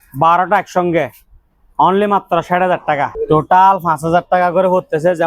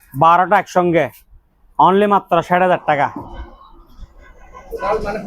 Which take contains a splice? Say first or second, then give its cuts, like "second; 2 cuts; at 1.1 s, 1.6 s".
first; 1 cut; at 3.1 s